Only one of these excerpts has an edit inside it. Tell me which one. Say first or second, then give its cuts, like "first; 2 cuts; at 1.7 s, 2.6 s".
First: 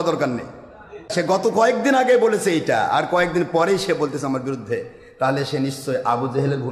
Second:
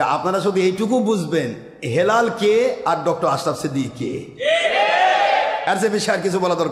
first; 1 cut; at 1.1 s